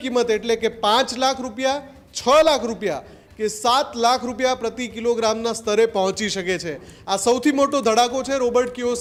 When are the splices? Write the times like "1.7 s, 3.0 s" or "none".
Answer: none